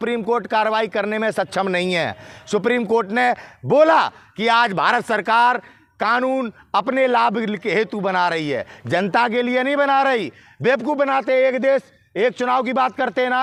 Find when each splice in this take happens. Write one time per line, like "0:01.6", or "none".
none